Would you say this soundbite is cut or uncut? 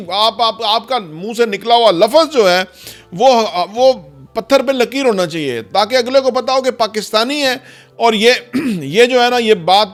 uncut